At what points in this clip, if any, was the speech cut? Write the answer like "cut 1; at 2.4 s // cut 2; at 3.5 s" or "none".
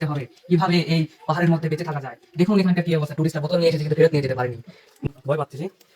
cut 1; at 5.0 s